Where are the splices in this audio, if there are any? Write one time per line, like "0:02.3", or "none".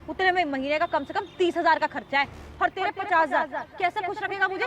0:02.4
0:03.6